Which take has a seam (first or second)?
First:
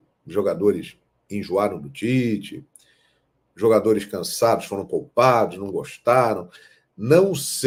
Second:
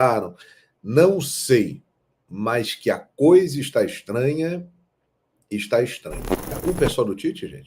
second